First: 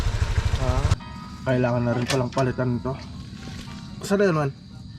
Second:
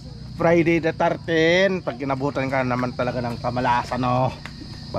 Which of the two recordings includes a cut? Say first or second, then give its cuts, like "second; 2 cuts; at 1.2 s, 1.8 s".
first; 1 cut; at 0.9 s